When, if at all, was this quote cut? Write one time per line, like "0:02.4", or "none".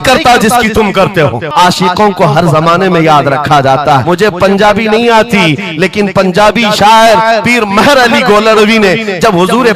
0:01.5
0:04.0